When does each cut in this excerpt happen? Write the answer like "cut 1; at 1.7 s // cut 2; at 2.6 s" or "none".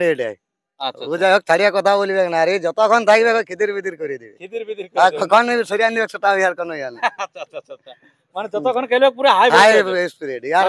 none

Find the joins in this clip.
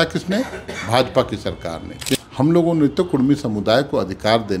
cut 1; at 2.1 s

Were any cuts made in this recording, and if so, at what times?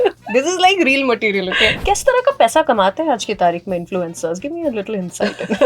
cut 1; at 1.7 s

